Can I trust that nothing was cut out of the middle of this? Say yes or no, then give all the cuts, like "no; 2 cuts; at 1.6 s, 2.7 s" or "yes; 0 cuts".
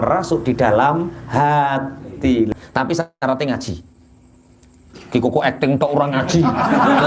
no; 1 cut; at 2.5 s